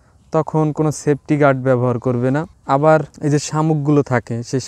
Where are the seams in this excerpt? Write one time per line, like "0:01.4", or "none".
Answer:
0:02.5
0:03.1